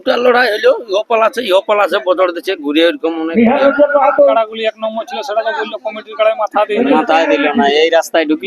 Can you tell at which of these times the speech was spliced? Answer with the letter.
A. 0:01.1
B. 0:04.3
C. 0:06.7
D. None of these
B